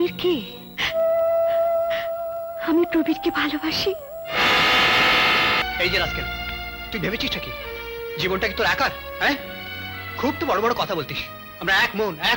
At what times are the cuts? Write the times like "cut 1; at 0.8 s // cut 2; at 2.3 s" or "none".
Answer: cut 1; at 5.6 s